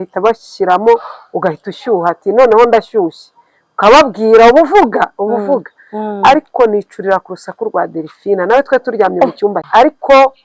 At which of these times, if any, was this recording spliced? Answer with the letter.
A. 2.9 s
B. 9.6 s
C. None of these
B